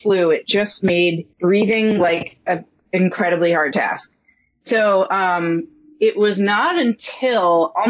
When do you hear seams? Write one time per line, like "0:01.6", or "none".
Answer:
0:01.3